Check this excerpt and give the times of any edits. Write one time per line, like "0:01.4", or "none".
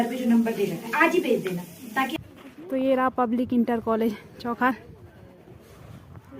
0:02.1

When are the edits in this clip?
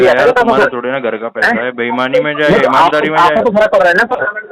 none

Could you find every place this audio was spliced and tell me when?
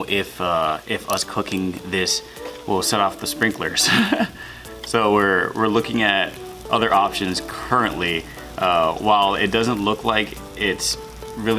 none

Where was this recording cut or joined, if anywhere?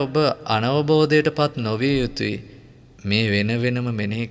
none

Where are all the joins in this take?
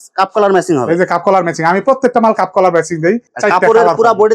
0:03.3

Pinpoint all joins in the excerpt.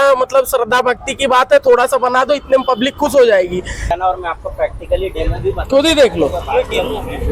0:03.9

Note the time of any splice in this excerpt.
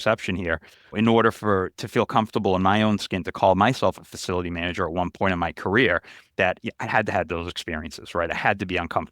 0:00.9

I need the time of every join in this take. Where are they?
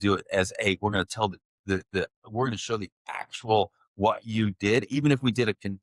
none

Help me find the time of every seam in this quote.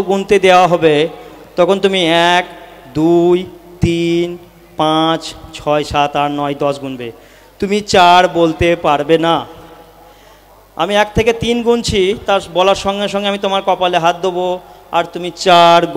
none

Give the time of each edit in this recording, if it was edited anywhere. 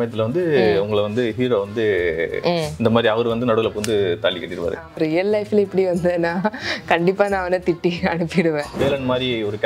0:04.9
0:08.7

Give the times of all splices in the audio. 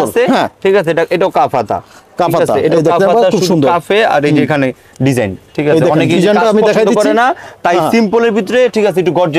none

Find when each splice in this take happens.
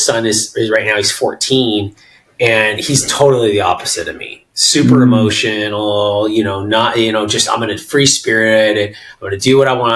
none

